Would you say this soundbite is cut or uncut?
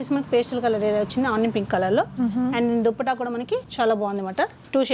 uncut